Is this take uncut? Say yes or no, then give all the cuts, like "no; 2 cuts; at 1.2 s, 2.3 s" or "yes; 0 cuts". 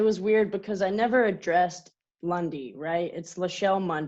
yes; 0 cuts